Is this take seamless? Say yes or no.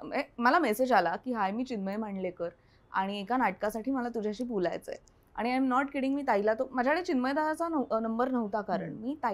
yes